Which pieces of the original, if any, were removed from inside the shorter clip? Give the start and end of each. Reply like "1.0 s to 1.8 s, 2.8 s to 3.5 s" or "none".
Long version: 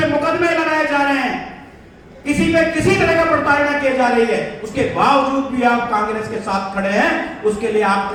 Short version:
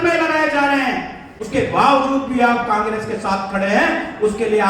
1.7 s to 4.6 s